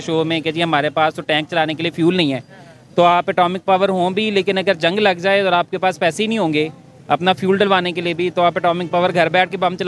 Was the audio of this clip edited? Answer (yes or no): no